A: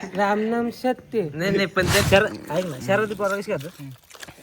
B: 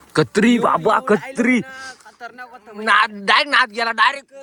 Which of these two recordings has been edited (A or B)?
A